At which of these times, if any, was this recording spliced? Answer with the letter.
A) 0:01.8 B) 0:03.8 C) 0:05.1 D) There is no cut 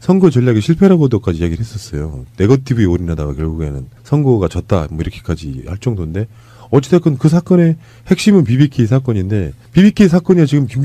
B